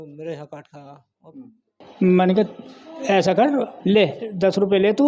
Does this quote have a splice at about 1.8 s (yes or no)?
yes